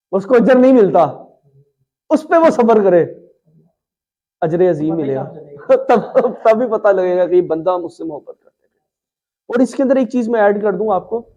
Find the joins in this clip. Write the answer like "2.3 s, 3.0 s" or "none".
none